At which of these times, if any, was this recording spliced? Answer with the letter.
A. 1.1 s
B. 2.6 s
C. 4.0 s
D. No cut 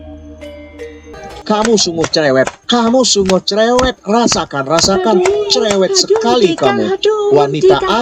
A